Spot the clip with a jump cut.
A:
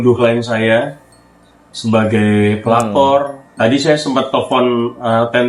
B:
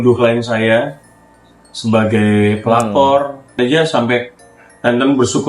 B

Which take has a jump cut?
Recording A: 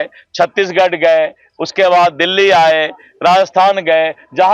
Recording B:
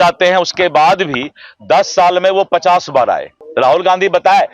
B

